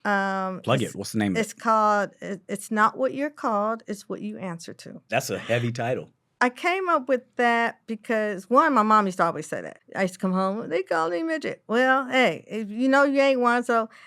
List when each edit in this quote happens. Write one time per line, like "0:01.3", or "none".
0:05.1
0:06.2
0:09.8